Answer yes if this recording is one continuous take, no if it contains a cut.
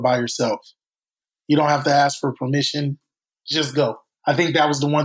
no